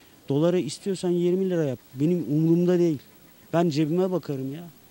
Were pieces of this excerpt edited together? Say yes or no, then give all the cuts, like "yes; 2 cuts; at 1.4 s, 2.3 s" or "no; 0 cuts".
yes; 1 cut; at 1.8 s